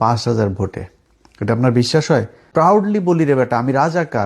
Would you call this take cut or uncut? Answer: cut